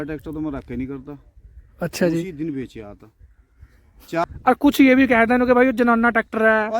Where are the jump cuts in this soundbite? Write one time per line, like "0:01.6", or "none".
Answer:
0:04.2